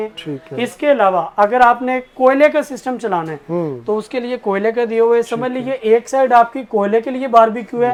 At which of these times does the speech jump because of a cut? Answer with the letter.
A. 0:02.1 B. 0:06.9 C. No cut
C